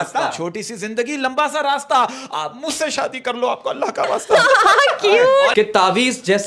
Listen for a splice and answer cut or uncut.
cut